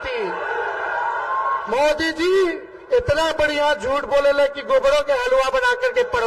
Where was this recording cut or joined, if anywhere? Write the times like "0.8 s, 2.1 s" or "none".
none